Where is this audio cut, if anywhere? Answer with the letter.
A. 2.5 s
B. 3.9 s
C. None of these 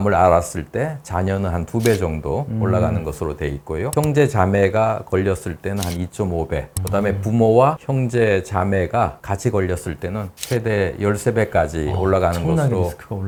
C